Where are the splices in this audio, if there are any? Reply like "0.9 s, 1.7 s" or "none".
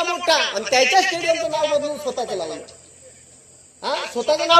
none